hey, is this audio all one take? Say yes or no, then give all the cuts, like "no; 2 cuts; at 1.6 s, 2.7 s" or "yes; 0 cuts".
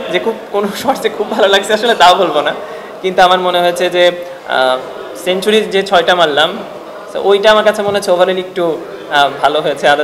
yes; 0 cuts